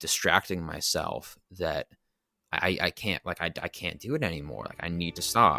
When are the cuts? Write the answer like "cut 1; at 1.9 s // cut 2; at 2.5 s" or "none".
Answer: none